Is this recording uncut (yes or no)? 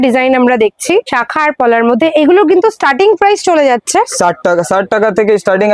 yes